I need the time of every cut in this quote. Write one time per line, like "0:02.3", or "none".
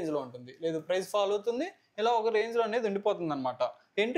none